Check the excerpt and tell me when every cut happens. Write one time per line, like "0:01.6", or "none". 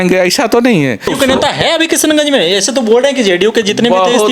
0:01.1

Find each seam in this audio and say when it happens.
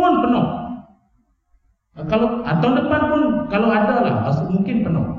none

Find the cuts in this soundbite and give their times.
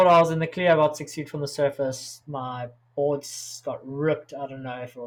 none

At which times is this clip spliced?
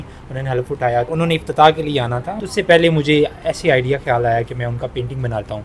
0:01.1
0:02.3

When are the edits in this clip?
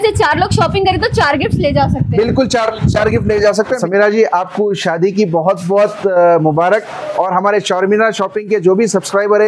0:03.8

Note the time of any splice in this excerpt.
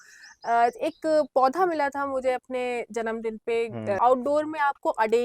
0:04.0

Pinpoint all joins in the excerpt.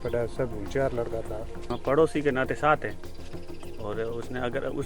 0:01.7

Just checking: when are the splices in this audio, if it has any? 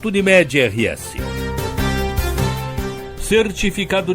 0:01.3
0:03.1

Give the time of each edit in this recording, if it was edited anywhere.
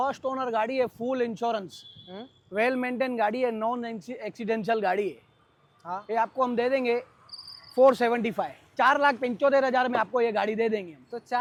none

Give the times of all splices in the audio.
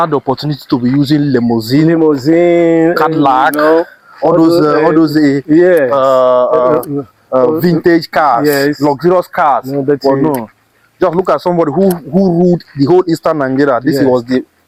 none

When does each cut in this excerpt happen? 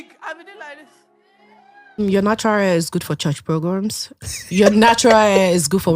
0:02.0

